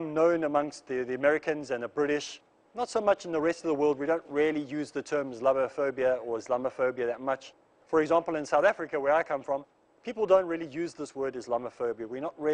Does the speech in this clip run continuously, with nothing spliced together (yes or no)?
yes